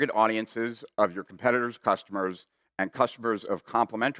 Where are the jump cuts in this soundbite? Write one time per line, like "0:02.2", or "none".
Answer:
none